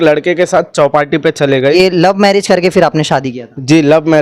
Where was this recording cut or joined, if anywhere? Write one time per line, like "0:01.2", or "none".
0:01.8